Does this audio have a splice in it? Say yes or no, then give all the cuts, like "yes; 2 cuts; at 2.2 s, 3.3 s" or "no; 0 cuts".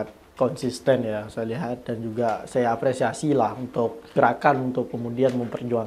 yes; 1 cut; at 4.1 s